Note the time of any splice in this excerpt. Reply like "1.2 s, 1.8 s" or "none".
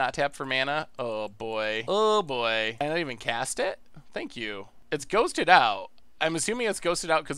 1.8 s, 2.8 s, 4.7 s